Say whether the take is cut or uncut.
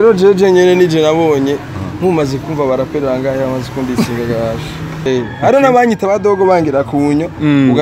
cut